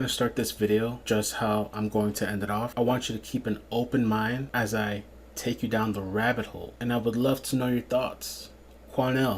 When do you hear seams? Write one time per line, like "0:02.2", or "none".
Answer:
0:01.0
0:02.7
0:04.5
0:06.6

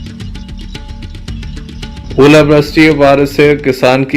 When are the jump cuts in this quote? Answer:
none

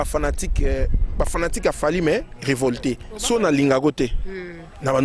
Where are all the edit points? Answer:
0:03.1

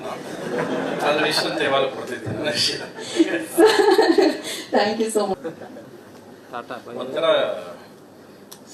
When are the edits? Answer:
0:05.3

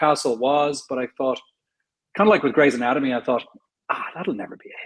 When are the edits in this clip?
none

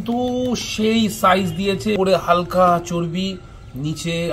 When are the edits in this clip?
0:02.0

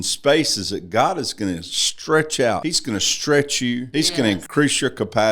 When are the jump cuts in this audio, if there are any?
0:02.7
0:04.3

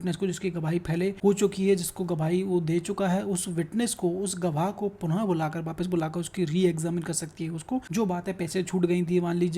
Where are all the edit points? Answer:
0:01.2
0:07.9

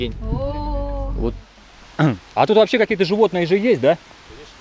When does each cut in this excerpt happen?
0:01.4

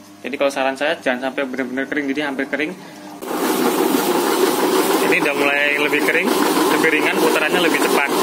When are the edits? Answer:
0:03.1

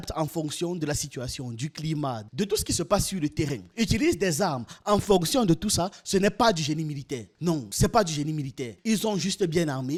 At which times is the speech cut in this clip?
none

